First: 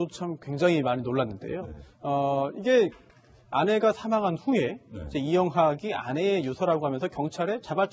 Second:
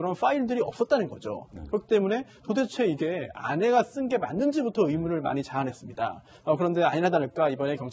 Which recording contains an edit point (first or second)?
second